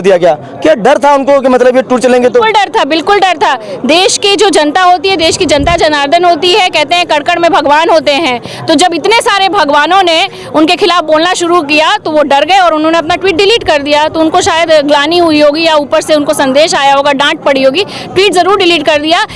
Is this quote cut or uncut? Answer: uncut